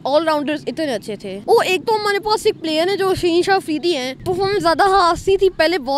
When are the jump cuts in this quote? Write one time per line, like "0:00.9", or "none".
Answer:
0:01.3
0:04.1

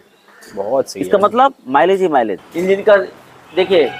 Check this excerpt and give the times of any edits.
0:02.4

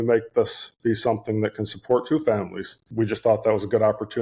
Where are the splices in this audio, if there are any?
0:02.8

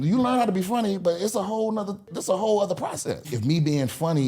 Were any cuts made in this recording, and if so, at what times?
0:02.1
0:03.3

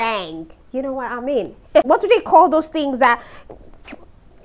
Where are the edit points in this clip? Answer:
0:01.9

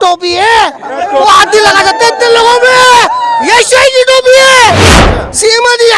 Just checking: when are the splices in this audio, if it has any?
0:04.9

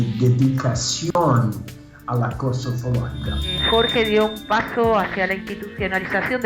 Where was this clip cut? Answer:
0:03.6

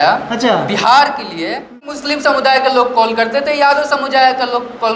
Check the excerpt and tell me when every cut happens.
0:01.9

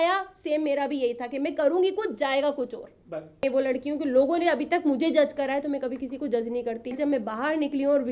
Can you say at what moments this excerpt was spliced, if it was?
0:03.4
0:07.0

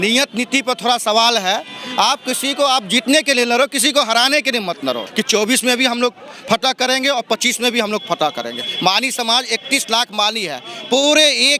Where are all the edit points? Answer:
0:05.1

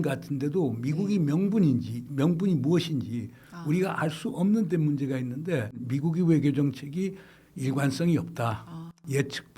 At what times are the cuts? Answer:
0:05.9

